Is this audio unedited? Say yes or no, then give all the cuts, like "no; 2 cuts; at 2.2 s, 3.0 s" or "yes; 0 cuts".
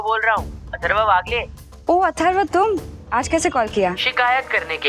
no; 2 cuts; at 2.9 s, 4.0 s